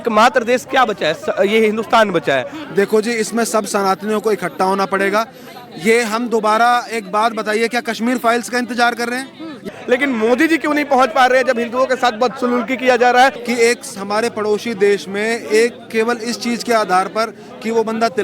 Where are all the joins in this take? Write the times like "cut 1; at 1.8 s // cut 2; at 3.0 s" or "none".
cut 1; at 2.6 s // cut 2; at 9.7 s // cut 3; at 13.4 s